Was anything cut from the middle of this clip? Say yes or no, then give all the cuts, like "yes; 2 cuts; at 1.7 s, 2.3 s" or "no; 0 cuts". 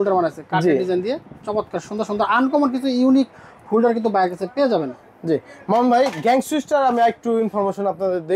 no; 0 cuts